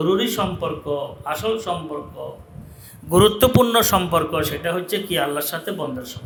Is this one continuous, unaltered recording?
yes; 0 cuts

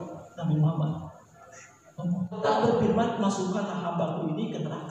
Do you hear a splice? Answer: yes; 1 cut; at 2.4 s

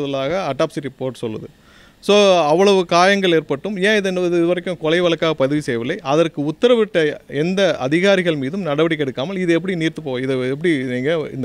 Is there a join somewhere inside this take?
no; 0 cuts

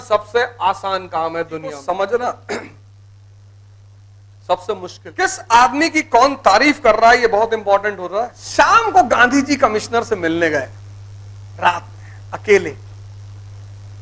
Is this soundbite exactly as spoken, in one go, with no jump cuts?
no; 3 cuts; at 1.8 s, 5.0 s, 8.4 s

